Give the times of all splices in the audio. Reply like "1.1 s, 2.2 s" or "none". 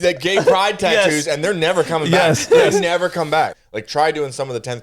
3.5 s